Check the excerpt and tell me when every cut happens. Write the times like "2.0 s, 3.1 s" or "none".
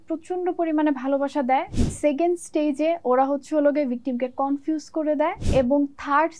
1.8 s, 5.4 s